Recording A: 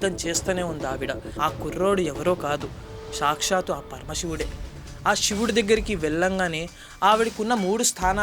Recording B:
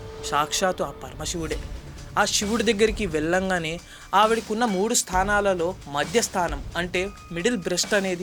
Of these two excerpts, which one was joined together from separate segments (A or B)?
A